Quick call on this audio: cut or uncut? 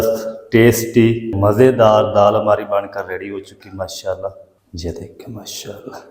cut